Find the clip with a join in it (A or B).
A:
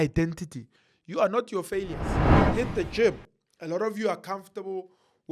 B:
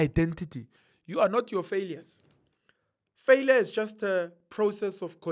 A